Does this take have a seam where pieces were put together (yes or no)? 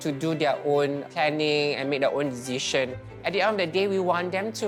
no